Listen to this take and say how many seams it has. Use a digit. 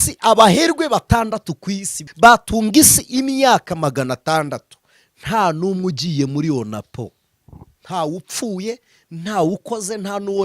1